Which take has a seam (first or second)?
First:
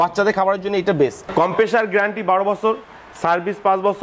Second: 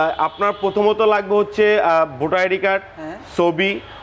first